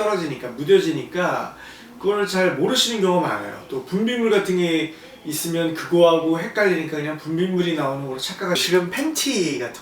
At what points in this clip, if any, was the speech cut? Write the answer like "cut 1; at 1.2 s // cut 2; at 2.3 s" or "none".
cut 1; at 8.6 s

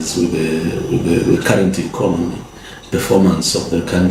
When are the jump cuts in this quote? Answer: none

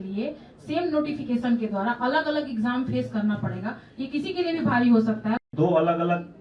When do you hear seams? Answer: cut 1; at 5.5 s

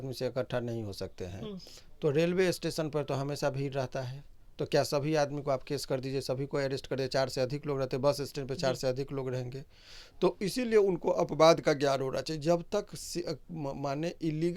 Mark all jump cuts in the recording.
none

